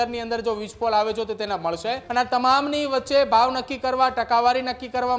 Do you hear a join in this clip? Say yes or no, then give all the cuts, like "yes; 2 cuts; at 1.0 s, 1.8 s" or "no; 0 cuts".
yes; 1 cut; at 2.0 s